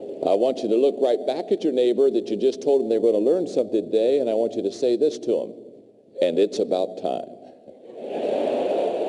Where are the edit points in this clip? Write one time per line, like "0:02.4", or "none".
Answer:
none